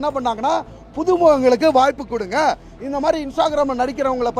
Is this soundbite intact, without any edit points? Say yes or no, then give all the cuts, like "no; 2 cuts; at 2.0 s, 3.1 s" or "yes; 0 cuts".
yes; 0 cuts